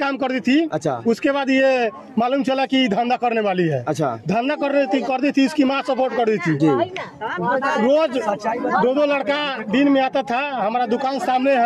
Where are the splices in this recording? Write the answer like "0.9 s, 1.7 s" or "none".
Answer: none